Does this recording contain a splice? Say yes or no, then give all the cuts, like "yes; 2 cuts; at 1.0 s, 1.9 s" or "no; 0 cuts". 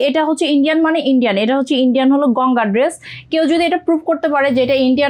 no; 0 cuts